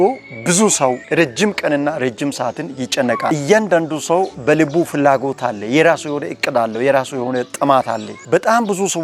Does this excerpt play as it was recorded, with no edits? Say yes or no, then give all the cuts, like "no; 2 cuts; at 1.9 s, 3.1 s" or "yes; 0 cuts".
no; 3 cuts; at 1.0 s, 3.2 s, 4.3 s